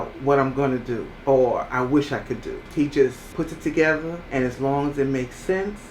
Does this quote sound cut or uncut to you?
cut